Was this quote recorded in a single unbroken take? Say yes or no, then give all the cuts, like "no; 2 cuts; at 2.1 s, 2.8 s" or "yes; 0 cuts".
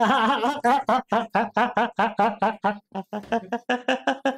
yes; 0 cuts